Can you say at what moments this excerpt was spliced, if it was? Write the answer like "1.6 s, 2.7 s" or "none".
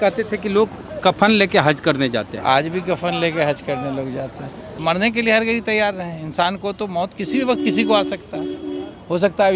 4.8 s